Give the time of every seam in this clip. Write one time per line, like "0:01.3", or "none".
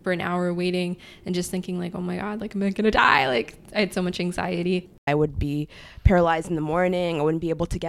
0:05.1